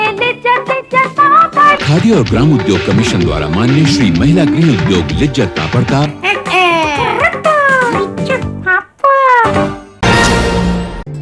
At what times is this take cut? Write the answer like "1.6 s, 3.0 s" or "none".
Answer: 9.9 s